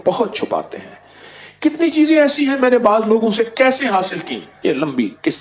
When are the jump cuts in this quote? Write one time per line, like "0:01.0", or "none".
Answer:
0:04.4